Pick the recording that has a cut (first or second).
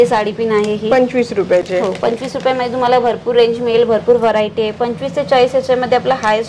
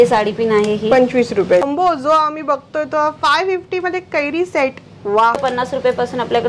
second